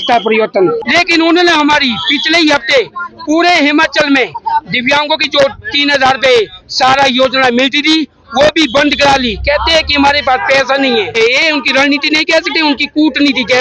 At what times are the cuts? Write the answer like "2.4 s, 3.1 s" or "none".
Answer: 0.8 s, 11.2 s